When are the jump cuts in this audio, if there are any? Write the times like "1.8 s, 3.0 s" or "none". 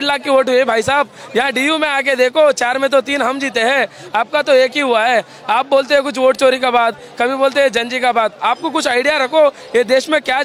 none